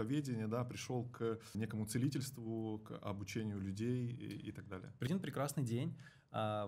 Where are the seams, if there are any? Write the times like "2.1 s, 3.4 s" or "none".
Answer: 1.5 s, 5.1 s